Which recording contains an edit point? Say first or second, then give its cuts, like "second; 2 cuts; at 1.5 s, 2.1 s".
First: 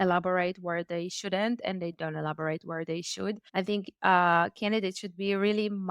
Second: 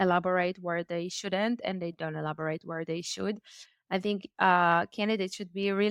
first; 1 cut; at 3.4 s